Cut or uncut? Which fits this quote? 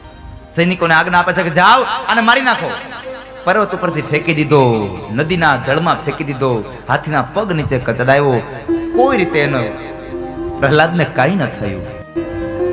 uncut